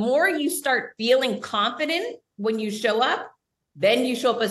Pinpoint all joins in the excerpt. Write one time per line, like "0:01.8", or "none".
0:00.9